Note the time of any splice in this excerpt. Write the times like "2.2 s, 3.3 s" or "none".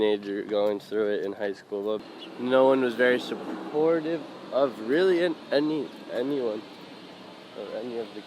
2.1 s